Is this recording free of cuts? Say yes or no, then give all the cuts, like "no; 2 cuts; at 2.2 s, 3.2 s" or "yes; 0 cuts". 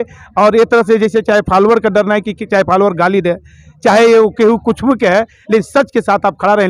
yes; 0 cuts